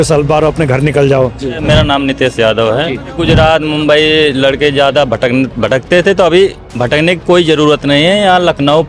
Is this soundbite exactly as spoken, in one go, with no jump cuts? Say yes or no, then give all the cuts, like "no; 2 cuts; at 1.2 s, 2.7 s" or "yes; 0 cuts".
no; 2 cuts; at 1.6 s, 3.2 s